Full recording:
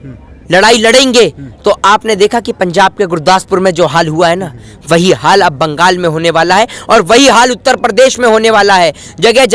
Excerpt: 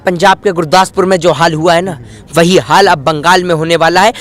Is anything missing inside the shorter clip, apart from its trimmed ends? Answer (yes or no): no